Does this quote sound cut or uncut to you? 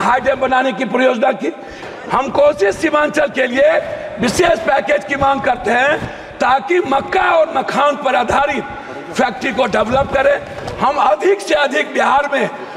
cut